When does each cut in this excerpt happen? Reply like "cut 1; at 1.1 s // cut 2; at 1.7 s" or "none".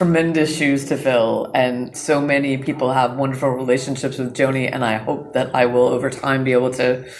none